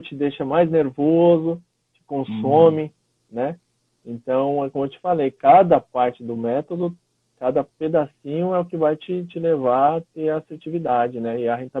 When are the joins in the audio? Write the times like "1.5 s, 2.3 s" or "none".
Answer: none